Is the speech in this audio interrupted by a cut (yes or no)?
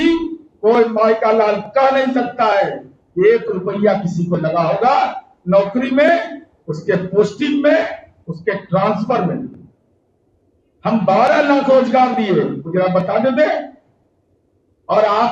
no